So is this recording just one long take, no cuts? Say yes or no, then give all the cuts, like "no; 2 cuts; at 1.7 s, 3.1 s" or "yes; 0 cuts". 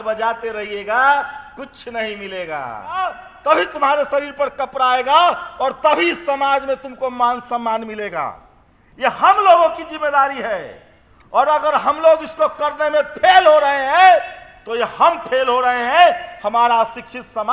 no; 1 cut; at 3.0 s